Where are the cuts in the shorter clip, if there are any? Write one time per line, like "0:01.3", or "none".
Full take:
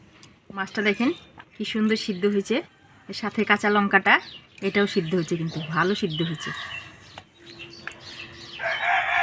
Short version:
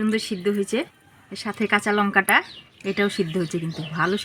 none